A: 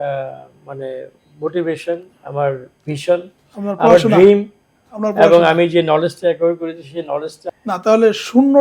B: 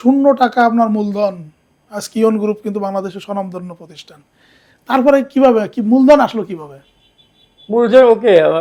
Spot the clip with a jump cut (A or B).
A